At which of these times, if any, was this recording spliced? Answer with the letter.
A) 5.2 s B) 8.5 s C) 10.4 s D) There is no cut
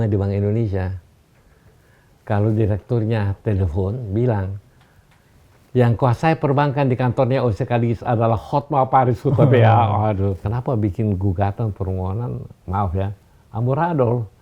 C